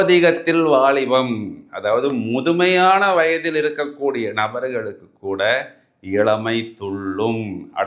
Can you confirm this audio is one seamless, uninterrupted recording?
yes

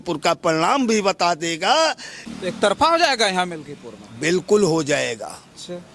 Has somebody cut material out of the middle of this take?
yes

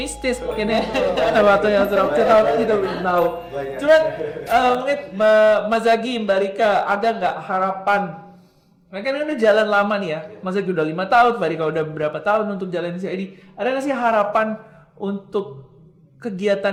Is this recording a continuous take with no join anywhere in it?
yes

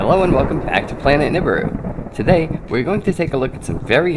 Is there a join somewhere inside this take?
yes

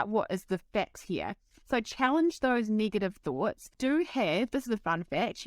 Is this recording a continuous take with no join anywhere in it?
no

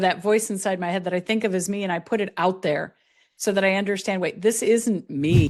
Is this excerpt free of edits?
yes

